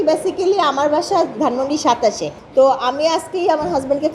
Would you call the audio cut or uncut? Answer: cut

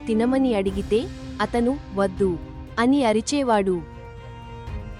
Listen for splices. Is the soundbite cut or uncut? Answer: cut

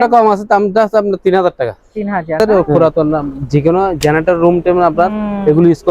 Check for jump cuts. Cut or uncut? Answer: cut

